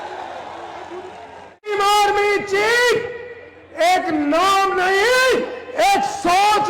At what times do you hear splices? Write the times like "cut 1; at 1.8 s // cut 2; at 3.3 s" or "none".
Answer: cut 1; at 1.7 s